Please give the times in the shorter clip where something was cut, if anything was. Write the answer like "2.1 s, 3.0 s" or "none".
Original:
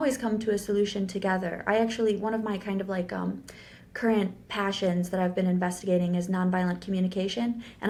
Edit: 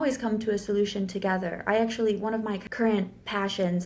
2.6 s